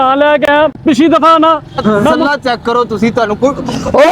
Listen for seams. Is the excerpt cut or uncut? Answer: cut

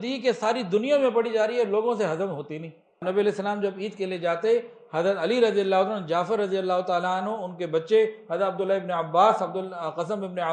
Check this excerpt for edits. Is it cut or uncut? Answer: cut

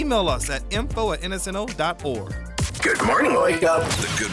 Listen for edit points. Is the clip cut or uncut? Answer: cut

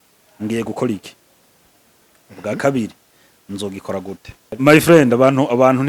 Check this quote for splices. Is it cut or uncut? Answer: cut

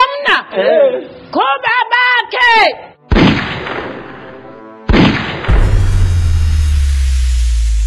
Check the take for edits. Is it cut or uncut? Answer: uncut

